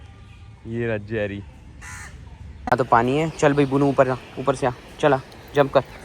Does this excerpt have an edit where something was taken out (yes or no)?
yes